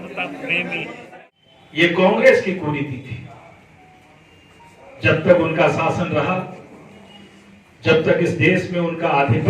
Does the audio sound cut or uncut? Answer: cut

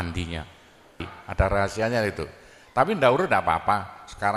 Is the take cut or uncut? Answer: cut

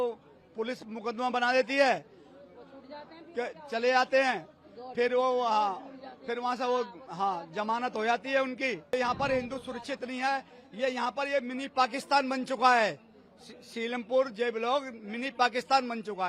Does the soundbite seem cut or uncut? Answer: cut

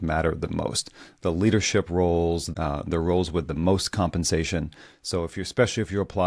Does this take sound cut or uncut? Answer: cut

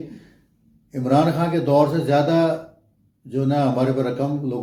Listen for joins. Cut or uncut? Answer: uncut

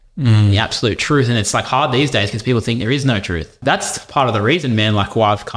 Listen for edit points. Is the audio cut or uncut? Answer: cut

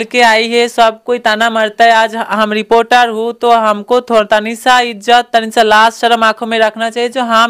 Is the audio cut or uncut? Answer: uncut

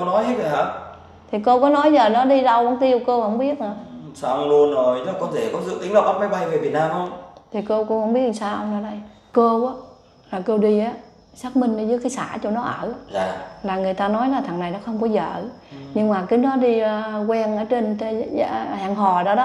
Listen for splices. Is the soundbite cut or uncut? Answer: cut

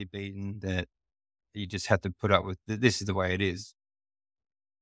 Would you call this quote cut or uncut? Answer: cut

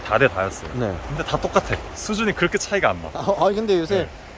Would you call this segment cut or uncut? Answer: cut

